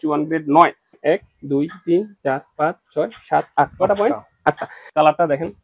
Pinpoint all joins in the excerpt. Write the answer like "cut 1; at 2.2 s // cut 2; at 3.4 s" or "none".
cut 1; at 1.0 s // cut 2; at 4.7 s

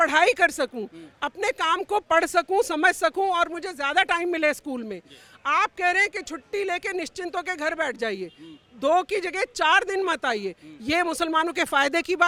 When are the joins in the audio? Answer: none

